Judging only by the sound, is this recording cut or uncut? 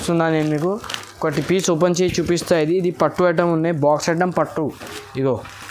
uncut